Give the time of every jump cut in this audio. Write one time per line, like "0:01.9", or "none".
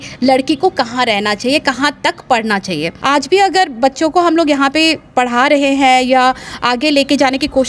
0:02.9